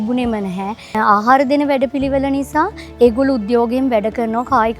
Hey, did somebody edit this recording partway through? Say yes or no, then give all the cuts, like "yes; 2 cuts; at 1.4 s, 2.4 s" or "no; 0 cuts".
yes; 1 cut; at 1.0 s